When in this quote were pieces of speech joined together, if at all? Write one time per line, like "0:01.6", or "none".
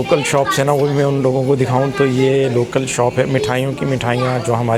none